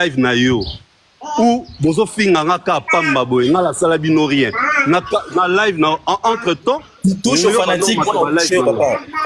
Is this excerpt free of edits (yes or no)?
yes